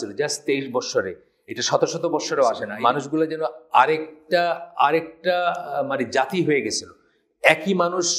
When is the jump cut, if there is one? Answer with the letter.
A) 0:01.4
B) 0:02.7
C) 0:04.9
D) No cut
B